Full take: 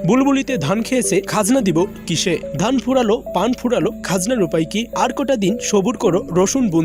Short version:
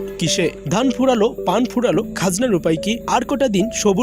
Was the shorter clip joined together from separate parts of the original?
no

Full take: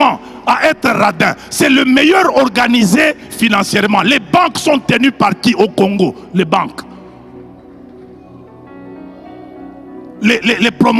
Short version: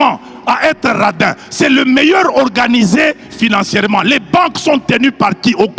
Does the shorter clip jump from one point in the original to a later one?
no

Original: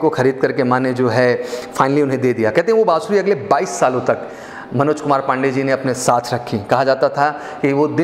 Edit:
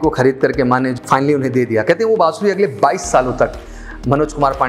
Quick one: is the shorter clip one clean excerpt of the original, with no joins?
no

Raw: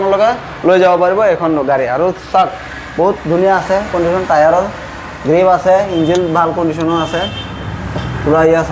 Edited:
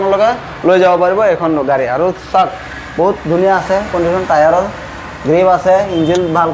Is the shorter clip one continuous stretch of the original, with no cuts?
yes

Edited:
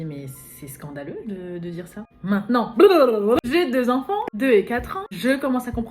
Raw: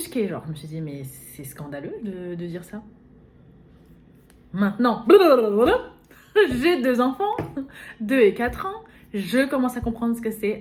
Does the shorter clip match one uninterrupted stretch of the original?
no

